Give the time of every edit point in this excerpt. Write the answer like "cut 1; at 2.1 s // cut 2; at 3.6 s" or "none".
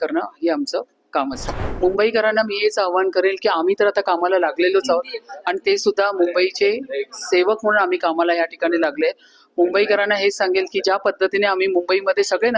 cut 1; at 1.4 s